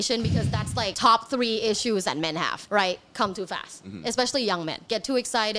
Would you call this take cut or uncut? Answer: cut